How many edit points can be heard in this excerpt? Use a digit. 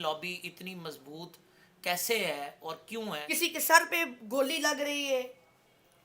1